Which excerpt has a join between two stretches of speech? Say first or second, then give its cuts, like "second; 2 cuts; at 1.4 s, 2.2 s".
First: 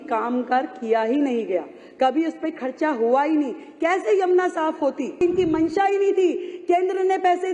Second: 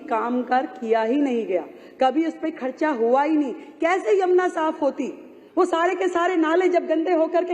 first; 1 cut; at 5.2 s